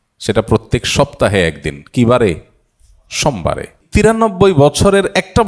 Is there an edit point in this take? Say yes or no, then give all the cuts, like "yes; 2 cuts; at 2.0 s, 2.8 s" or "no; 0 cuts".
yes; 1 cut; at 3.8 s